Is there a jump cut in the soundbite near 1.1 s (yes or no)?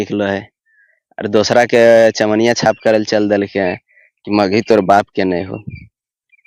no